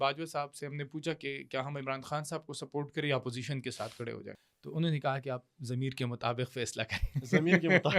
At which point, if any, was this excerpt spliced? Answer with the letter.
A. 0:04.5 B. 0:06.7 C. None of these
A